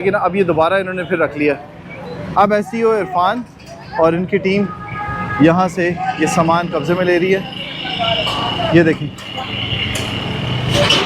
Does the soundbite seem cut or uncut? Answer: uncut